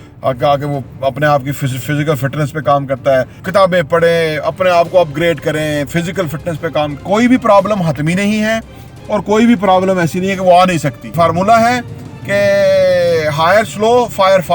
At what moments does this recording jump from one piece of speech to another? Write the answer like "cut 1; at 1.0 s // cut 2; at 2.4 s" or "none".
cut 1; at 3.4 s // cut 2; at 7.0 s // cut 3; at 11.1 s